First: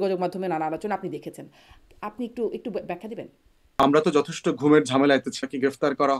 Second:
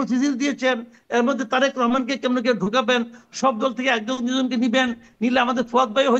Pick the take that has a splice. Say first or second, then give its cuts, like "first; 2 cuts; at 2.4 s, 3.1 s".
first; 2 cuts; at 3.6 s, 5.4 s